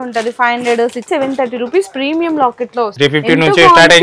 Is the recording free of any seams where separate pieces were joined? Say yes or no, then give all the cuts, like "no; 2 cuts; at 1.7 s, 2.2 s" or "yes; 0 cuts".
no; 2 cuts; at 1.1 s, 2.9 s